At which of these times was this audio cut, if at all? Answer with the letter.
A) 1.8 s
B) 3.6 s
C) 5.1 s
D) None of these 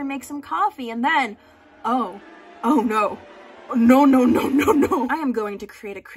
C